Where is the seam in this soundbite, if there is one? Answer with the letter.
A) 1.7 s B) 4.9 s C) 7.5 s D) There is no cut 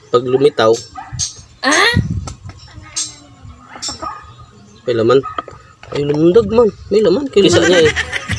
C